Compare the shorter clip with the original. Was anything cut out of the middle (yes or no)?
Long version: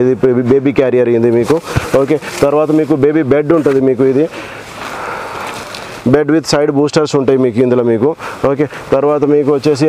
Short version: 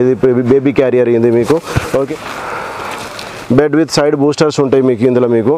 yes